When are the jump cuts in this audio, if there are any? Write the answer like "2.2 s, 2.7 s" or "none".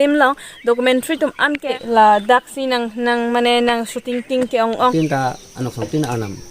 1.8 s, 4.9 s